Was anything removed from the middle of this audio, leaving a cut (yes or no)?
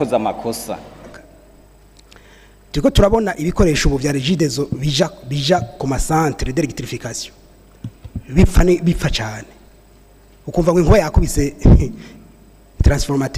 yes